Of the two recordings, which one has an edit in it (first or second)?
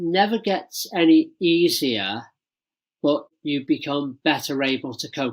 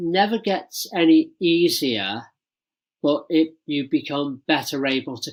first